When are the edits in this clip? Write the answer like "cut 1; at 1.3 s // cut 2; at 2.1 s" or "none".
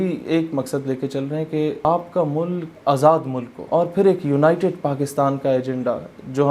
cut 1; at 1.8 s // cut 2; at 2.7 s // cut 3; at 3.5 s